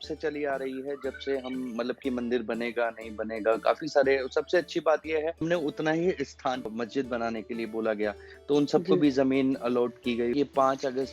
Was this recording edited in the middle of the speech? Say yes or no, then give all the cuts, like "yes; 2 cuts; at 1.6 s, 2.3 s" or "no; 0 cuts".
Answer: yes; 3 cuts; at 5.4 s, 6.7 s, 10.3 s